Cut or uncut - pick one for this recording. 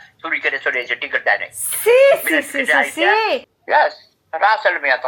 cut